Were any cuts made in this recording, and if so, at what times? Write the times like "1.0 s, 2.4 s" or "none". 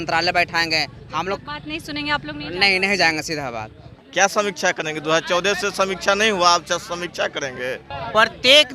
3.9 s, 7.9 s